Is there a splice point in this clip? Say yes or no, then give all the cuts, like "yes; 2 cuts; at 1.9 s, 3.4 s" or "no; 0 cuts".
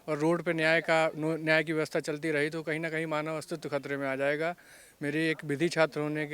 no; 0 cuts